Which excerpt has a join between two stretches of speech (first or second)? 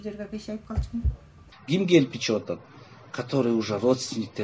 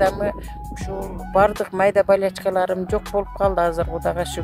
first